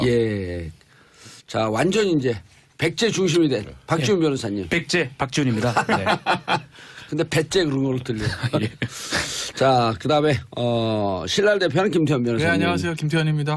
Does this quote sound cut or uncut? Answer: cut